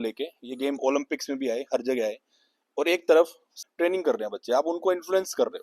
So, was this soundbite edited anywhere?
yes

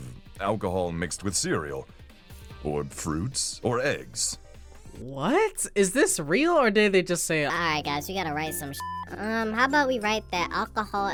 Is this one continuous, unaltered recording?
yes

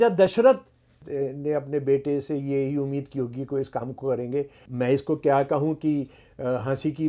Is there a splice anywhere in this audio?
yes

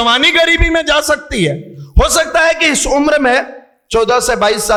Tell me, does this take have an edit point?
no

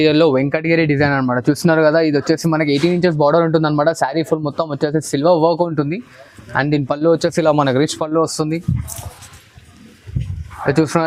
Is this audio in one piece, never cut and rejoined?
yes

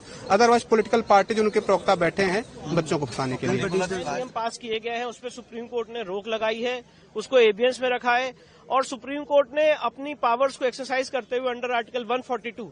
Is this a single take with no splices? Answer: no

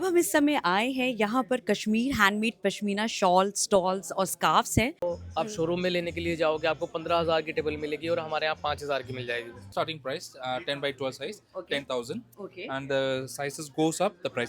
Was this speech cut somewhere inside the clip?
yes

